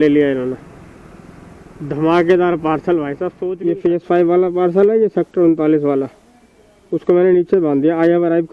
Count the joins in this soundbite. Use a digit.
1